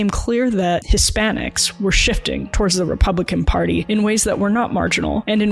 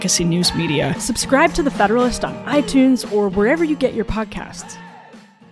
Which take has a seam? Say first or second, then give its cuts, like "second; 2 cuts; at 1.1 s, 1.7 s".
second; 2 cuts; at 0.9 s, 4.5 s